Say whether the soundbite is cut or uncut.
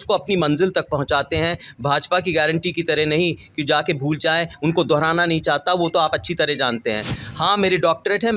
cut